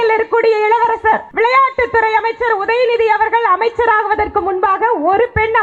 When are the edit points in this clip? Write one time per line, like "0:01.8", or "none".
0:01.3